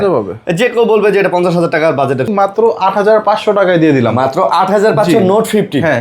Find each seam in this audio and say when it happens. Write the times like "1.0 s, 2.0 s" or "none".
2.3 s